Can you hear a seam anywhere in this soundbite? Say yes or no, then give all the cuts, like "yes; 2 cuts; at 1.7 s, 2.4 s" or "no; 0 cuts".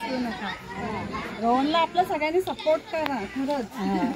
no; 0 cuts